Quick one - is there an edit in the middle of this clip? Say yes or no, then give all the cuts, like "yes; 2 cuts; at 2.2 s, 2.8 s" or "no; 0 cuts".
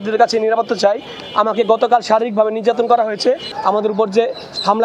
yes; 1 cut; at 3.5 s